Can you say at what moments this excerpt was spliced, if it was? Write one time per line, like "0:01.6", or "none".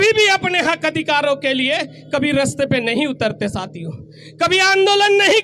none